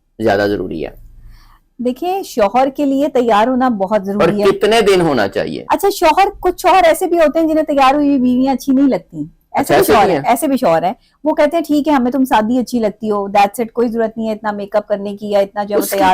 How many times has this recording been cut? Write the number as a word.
zero